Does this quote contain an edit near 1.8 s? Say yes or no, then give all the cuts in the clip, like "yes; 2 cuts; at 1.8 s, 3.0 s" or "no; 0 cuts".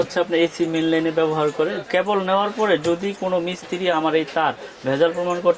yes; 2 cuts; at 1.8 s, 4.0 s